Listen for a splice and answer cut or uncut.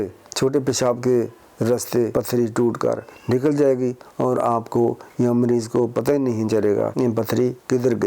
cut